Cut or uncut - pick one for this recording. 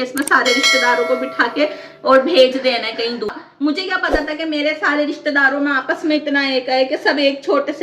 cut